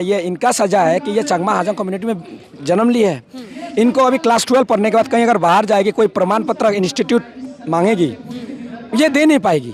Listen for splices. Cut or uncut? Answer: uncut